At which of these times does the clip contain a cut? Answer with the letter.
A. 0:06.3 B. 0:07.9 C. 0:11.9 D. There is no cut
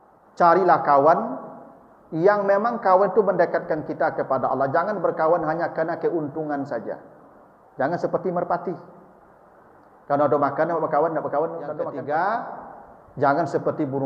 C